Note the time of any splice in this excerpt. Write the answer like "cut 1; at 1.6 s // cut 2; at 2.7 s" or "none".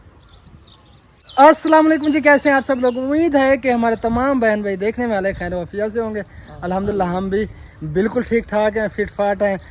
cut 1; at 1.2 s